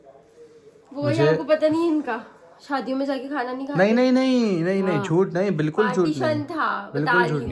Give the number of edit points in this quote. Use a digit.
0